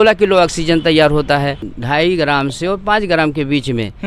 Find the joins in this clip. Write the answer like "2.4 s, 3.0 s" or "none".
1.6 s